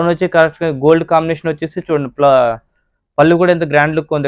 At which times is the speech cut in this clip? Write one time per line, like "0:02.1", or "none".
none